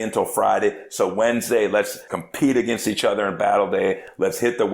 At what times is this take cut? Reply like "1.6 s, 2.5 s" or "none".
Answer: 2.0 s